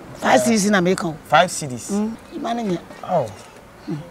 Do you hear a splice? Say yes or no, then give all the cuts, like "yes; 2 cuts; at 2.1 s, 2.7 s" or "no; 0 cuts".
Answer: yes; 1 cut; at 2.3 s